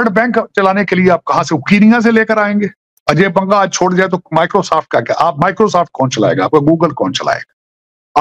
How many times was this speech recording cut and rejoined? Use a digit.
1